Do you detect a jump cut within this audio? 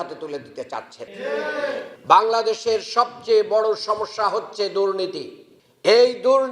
yes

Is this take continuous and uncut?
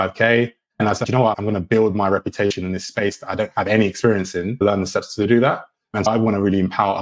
no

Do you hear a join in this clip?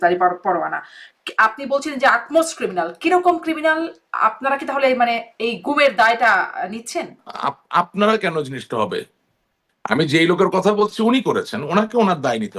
yes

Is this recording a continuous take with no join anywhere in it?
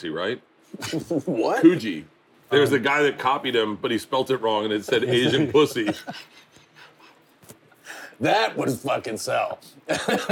no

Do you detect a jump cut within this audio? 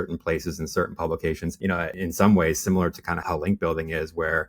yes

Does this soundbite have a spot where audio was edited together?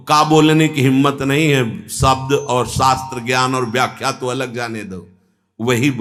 no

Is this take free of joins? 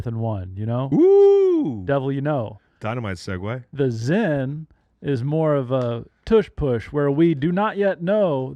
yes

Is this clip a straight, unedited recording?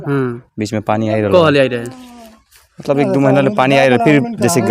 yes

